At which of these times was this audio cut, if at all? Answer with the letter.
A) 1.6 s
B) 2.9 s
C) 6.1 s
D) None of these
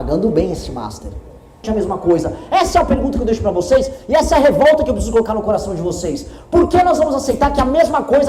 A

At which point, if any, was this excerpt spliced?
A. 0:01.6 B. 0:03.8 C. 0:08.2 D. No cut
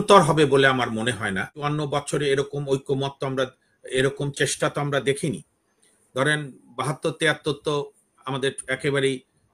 A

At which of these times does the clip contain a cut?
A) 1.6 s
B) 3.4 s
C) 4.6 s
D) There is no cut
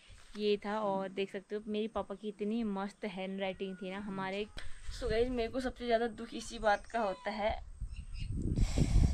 C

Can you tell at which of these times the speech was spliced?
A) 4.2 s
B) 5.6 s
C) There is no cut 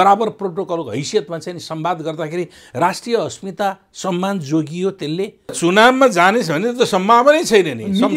B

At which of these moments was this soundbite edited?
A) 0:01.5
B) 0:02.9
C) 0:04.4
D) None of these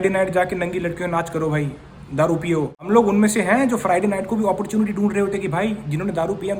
B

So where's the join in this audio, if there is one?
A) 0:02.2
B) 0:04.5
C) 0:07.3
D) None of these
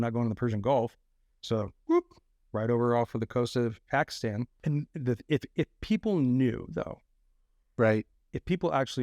B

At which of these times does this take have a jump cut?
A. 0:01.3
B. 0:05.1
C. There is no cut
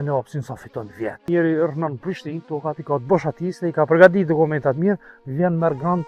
A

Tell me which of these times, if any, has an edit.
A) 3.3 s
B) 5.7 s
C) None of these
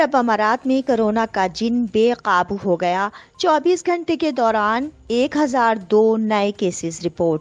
C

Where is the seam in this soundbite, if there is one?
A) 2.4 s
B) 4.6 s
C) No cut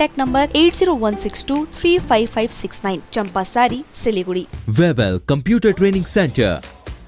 B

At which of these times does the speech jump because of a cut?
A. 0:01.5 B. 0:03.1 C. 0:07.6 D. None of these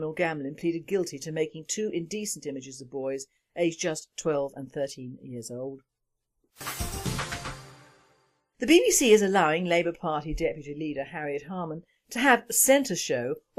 A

